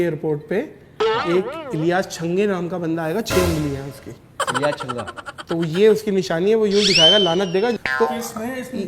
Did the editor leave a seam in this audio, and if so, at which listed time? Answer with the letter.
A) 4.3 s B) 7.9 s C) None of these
B